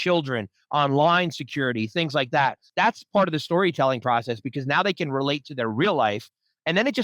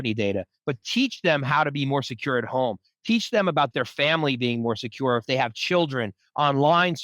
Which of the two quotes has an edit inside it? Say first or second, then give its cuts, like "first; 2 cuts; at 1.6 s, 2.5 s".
first; 1 cut; at 2.7 s